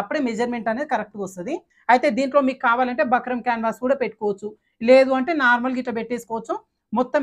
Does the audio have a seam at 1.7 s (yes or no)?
yes